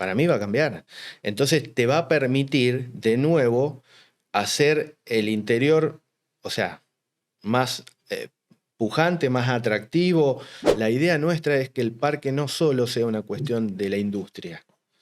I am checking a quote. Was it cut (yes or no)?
yes